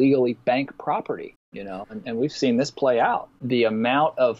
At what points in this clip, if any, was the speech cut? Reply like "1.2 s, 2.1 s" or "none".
3.4 s